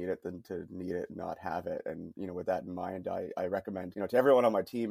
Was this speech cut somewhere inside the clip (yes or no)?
yes